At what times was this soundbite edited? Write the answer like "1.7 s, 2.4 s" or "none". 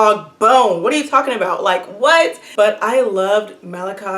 2.4 s